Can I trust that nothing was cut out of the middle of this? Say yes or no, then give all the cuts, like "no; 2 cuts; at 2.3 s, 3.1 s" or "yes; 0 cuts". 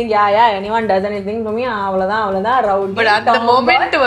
yes; 0 cuts